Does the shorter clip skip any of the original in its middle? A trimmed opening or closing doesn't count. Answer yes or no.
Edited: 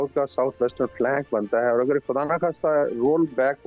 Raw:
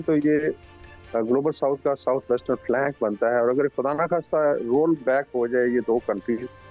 no